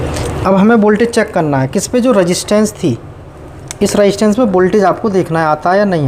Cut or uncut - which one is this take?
uncut